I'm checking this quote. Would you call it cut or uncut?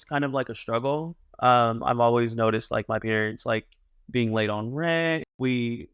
uncut